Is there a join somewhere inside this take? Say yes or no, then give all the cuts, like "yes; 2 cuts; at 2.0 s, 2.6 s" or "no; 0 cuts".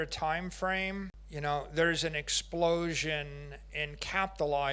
yes; 1 cut; at 1.2 s